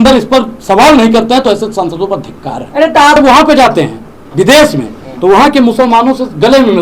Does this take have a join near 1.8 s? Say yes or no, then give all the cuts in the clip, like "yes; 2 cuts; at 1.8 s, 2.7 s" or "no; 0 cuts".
no; 1 cut; at 3.2 s